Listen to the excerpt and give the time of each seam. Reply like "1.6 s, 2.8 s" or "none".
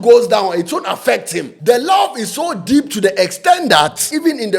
1.5 s

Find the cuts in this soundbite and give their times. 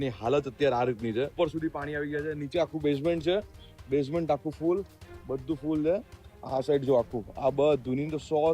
1.3 s

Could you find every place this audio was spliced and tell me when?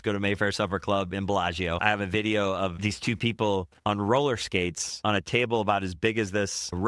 1.8 s

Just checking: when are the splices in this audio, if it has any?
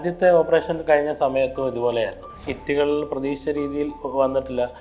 2.5 s

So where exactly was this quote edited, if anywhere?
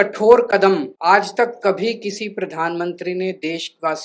0.9 s

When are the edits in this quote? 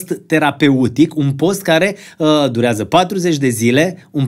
none

